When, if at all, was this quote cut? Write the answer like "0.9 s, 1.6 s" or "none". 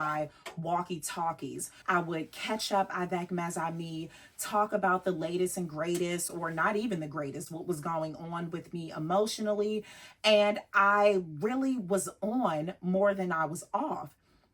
1.7 s